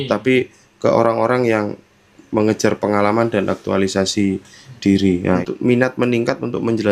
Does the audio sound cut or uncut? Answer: cut